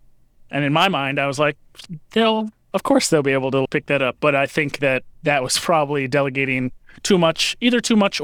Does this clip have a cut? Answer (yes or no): no